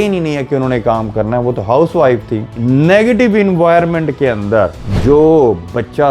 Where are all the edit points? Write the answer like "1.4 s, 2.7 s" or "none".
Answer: 2.5 s